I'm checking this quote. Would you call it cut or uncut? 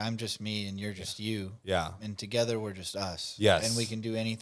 uncut